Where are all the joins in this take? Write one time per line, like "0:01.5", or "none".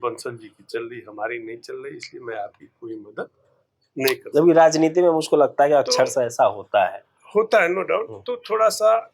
none